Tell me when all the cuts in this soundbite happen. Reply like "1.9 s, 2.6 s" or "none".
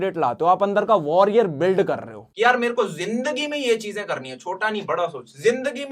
2.2 s